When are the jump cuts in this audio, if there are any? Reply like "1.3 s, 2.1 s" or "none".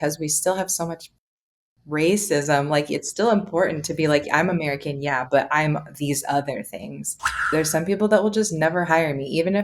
7.5 s